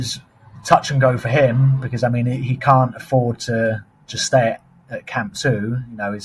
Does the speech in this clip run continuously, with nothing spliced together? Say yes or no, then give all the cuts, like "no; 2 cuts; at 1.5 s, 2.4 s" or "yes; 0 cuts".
yes; 0 cuts